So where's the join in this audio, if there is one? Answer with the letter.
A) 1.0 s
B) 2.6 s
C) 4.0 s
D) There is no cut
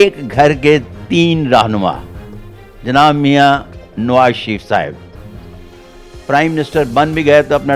D